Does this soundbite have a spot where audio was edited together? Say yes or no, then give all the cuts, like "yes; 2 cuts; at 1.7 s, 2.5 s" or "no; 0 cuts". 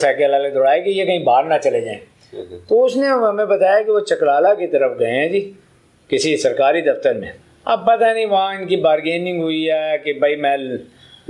no; 0 cuts